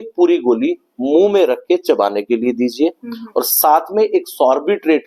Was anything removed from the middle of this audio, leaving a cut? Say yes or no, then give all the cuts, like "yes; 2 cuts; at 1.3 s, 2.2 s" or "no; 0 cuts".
no; 0 cuts